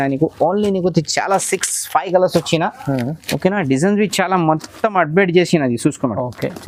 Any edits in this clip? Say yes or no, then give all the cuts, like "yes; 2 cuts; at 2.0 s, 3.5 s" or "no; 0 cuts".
no; 0 cuts